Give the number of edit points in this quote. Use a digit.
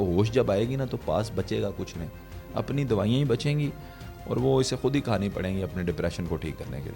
0